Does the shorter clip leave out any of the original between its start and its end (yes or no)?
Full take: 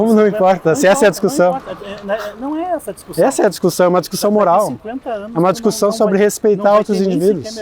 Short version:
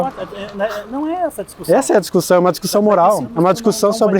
yes